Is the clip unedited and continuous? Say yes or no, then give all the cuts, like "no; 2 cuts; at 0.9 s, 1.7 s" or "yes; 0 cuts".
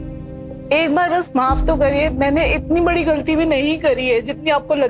yes; 0 cuts